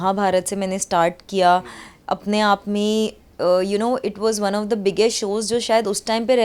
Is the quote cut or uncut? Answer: uncut